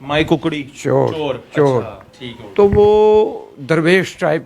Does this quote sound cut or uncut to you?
uncut